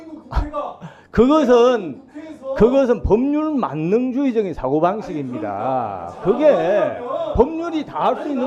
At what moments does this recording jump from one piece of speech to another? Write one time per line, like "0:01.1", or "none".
none